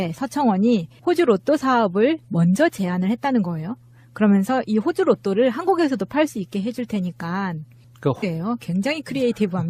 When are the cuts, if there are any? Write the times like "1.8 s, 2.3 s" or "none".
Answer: none